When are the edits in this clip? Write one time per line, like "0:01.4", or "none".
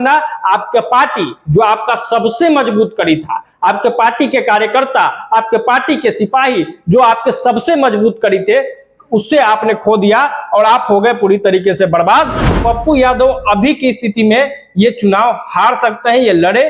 0:12.4